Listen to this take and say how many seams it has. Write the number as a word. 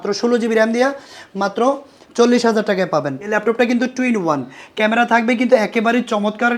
one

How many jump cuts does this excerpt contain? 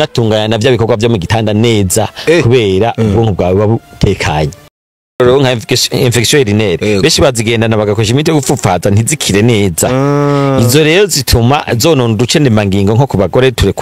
one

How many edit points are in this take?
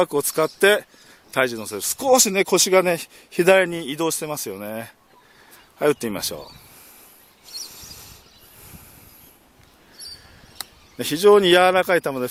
zero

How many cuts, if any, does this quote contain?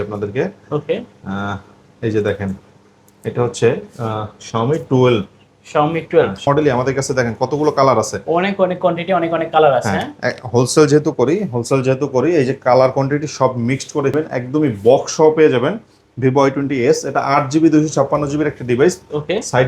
two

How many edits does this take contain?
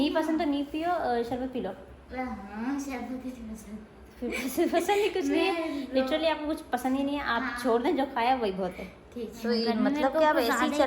one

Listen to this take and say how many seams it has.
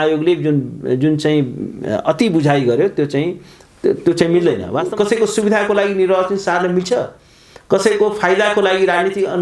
one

